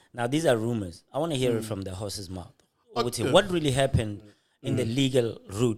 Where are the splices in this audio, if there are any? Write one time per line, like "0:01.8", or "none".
none